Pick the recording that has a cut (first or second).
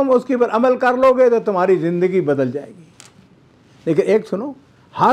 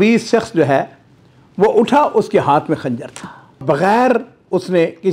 second